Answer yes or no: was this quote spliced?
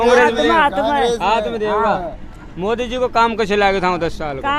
no